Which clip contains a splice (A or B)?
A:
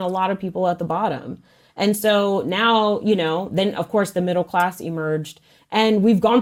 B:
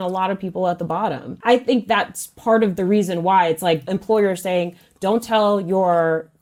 B